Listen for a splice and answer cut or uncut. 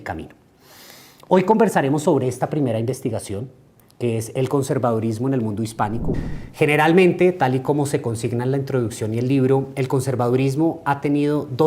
cut